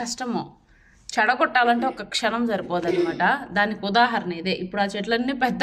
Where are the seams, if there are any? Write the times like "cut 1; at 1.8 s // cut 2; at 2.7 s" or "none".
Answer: none